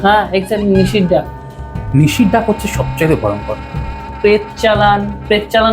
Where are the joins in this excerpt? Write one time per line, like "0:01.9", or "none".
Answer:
0:04.1